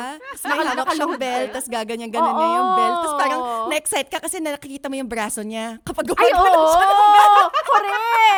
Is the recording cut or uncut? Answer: uncut